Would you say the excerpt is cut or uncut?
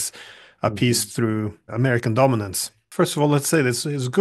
cut